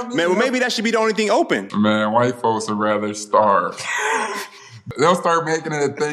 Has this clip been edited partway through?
yes; 2 cuts; at 1.7 s, 4.8 s

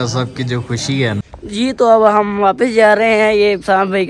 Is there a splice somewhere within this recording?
yes; 1 cut; at 1.2 s

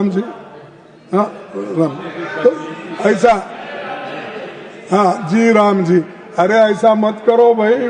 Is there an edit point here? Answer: no; 0 cuts

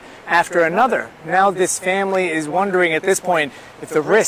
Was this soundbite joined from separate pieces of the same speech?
no; 0 cuts

